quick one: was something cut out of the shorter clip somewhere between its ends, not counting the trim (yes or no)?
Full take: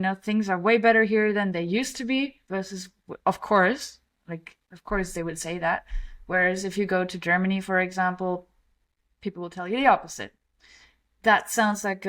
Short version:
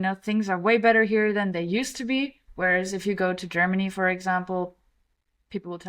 yes